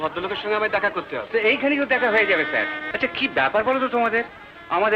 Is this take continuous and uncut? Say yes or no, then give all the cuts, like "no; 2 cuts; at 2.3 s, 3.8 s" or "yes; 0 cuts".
no; 1 cut; at 2.8 s